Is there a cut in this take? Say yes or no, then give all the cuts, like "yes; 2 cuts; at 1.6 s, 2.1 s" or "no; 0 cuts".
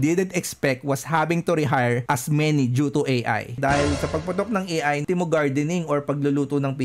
yes; 2 cuts; at 3.6 s, 5.0 s